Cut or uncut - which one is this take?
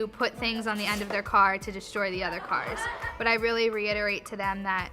uncut